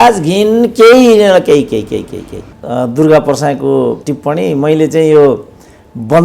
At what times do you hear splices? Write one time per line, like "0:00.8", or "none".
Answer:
0:02.5
0:04.1